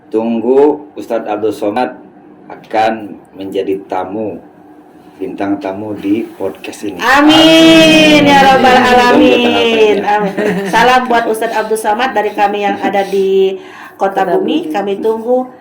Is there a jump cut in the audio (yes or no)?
yes